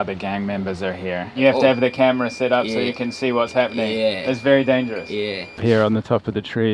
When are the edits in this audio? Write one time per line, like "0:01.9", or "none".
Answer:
0:01.3
0:04.2
0:05.4